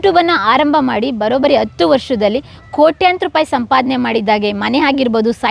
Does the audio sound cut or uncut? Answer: uncut